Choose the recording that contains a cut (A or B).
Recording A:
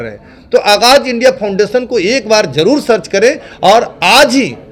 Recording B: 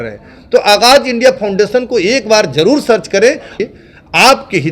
B